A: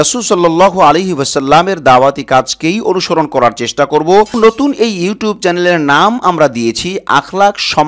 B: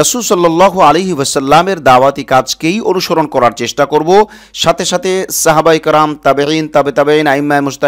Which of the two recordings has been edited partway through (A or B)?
A